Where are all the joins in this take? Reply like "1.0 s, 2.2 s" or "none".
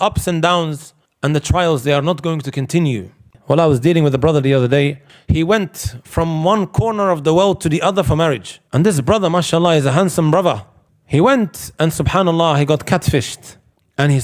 3.3 s